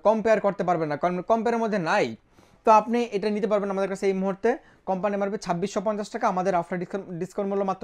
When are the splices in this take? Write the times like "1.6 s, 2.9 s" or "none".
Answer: none